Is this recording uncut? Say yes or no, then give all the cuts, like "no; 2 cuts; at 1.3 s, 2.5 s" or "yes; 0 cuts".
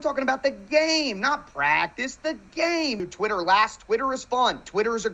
no; 1 cut; at 3.0 s